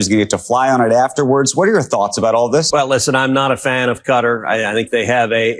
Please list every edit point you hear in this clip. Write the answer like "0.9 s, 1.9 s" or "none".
2.7 s